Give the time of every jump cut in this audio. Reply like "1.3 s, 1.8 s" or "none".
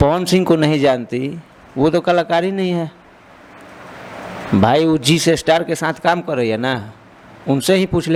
none